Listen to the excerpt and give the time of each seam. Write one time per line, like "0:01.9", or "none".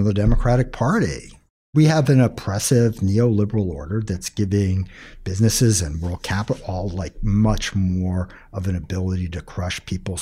0:01.7